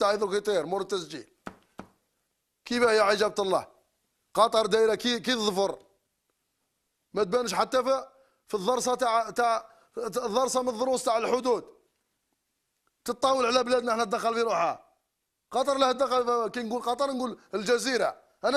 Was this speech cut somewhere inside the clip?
yes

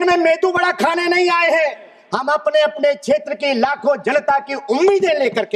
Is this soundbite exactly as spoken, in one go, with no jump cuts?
yes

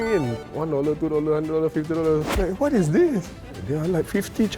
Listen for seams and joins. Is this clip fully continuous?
no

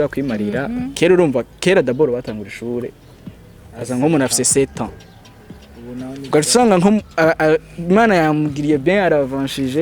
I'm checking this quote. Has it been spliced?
yes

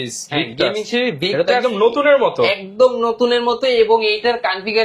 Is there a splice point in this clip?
no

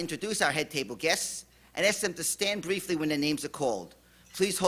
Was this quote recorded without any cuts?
no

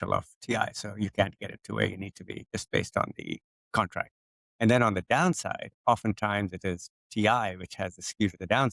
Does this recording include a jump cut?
no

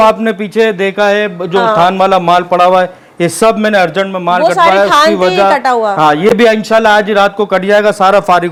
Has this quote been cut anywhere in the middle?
no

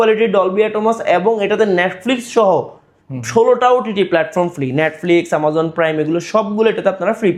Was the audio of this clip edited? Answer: no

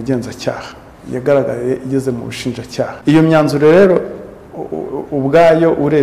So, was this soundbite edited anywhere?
yes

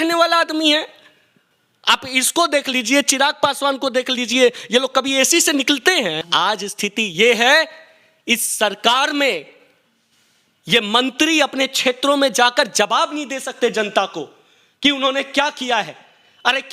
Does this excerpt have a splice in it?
yes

